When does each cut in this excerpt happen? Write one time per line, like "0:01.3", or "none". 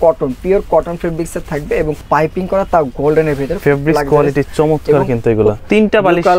0:02.0
0:05.6